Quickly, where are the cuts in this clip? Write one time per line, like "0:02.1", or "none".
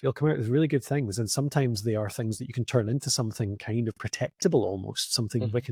none